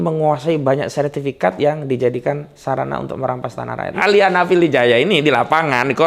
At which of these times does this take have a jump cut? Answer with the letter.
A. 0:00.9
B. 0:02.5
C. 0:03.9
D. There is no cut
C